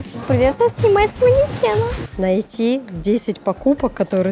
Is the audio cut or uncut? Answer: cut